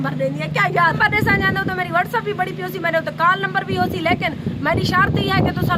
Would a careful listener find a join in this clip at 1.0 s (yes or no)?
yes